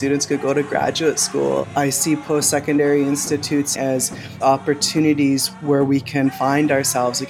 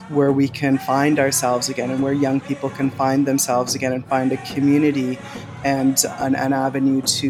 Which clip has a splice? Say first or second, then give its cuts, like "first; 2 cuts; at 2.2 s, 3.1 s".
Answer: first; 2 cuts; at 1.6 s, 3.7 s